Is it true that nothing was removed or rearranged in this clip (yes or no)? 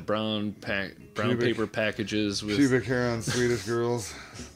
yes